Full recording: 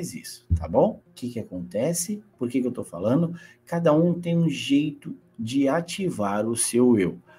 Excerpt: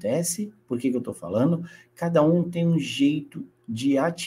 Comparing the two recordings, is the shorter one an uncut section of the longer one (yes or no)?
yes